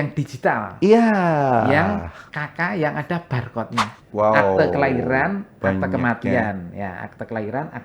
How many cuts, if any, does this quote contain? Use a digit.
1